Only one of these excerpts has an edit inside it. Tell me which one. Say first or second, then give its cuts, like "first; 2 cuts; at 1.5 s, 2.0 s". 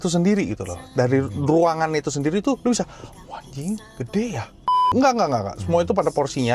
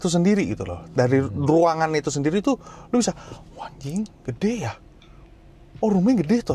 first; 2 cuts; at 2.6 s, 4.9 s